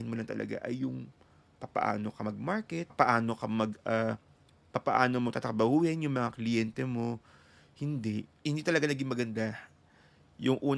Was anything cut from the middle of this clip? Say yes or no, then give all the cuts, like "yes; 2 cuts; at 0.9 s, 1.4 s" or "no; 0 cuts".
yes; 1 cut; at 8.3 s